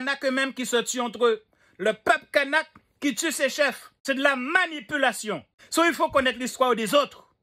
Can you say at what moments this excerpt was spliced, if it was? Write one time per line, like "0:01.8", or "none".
0:03.9
0:05.5

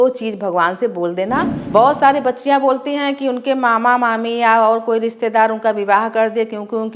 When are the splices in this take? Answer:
0:01.6

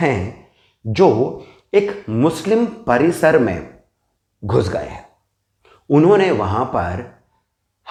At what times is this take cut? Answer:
none

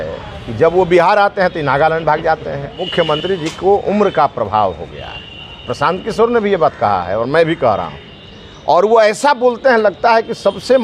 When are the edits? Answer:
0:03.2

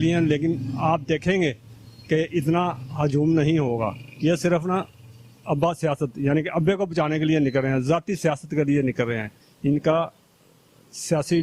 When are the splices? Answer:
none

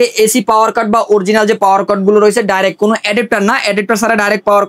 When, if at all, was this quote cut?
none

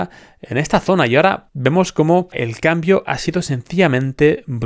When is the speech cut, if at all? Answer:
0:01.5
0:02.4

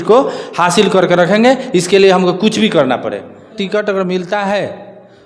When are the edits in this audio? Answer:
0:03.6

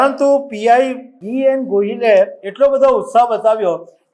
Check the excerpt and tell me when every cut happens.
0:01.3

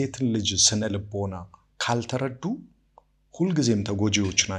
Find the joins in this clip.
none

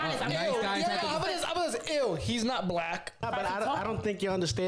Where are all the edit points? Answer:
0:03.2

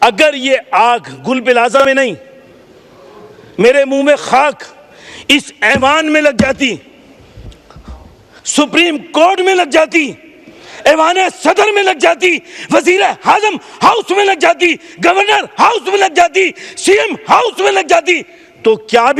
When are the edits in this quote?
none

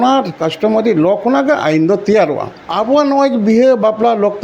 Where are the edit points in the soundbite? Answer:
0:02.6

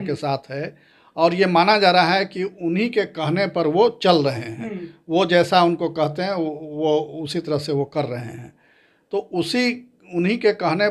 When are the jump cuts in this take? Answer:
none

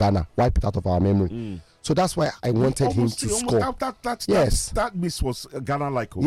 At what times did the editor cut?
none

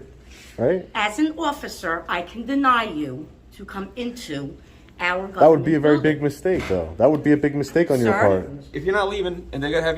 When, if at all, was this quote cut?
0:08.7

